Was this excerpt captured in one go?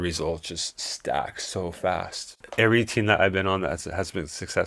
no; 1 cut; at 2.4 s

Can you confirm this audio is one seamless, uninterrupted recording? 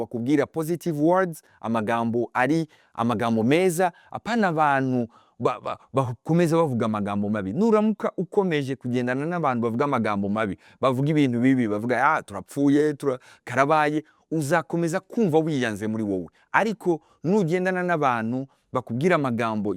yes; 0 cuts

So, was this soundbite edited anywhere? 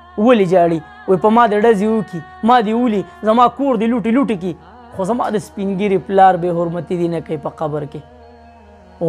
no; 0 cuts

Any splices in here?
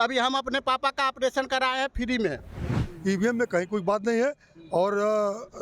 yes; 1 cut; at 2.9 s

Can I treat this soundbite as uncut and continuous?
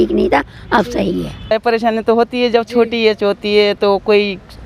no; 1 cut; at 1.5 s

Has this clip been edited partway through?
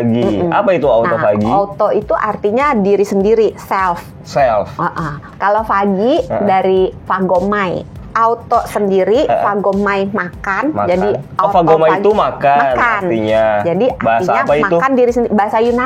yes; 2 cuts; at 5.3 s, 7.9 s

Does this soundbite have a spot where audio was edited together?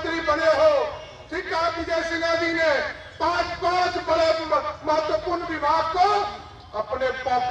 no; 0 cuts

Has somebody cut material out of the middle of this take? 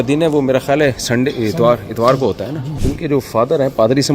yes; 1 cut; at 2.7 s

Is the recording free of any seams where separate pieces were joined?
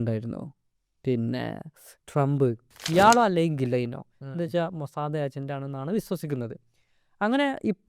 no; 1 cut; at 2.7 s

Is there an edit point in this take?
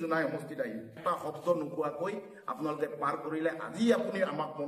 yes; 1 cut; at 0.9 s

